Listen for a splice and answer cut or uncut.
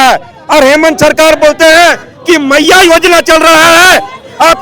uncut